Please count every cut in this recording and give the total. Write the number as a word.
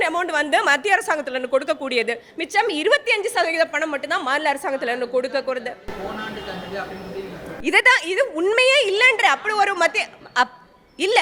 zero